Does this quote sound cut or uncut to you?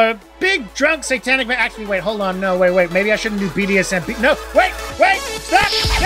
uncut